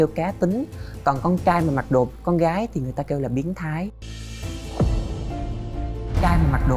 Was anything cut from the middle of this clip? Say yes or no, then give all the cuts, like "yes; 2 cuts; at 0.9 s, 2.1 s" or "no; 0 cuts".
no; 0 cuts